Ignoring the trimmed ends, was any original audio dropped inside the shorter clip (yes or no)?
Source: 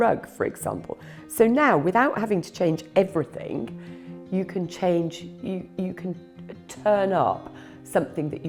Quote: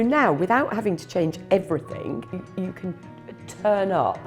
yes